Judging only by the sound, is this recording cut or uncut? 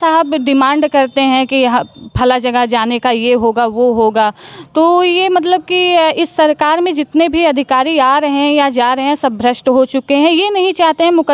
uncut